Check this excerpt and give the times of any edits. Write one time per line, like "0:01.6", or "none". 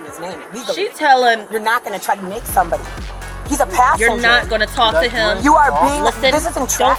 none